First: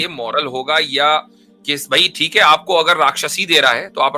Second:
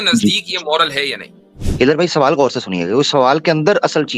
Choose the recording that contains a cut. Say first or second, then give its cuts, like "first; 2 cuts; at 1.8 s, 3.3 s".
second; 1 cut; at 1.6 s